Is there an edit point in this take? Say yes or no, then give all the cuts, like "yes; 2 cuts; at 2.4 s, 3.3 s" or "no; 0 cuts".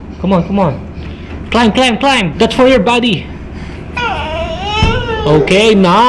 yes; 1 cut; at 2.3 s